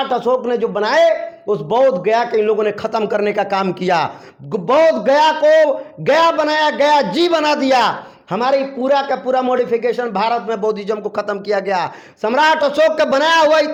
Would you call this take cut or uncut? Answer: uncut